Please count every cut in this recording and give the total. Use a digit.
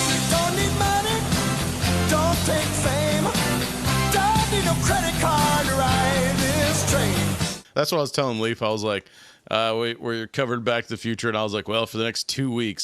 0